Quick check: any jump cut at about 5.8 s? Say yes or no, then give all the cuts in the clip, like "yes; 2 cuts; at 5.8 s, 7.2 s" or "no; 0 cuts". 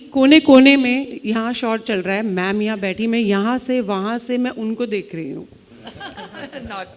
no; 0 cuts